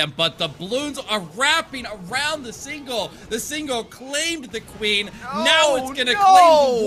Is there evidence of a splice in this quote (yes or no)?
no